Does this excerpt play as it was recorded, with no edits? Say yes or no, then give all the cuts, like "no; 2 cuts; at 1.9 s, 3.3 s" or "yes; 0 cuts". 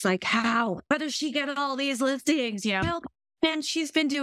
no; 1 cut; at 0.9 s